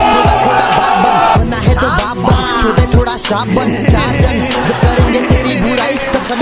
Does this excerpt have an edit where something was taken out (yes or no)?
no